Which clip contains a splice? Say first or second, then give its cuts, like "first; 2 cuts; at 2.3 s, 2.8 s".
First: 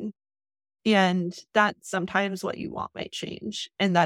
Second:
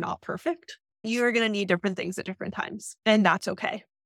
second; 2 cuts; at 1.1 s, 3.0 s